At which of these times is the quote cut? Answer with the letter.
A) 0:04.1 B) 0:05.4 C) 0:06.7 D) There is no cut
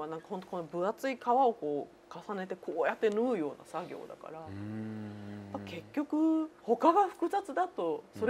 D